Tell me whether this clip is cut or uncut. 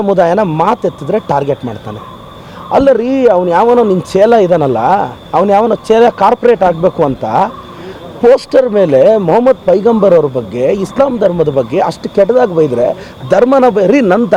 uncut